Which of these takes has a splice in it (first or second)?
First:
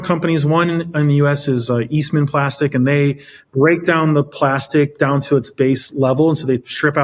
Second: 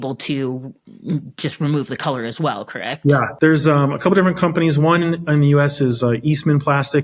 second